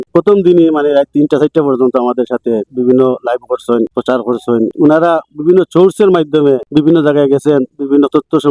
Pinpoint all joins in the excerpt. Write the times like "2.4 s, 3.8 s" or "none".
2.7 s